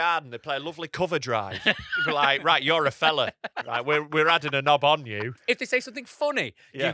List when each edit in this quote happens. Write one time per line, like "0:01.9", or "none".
0:05.3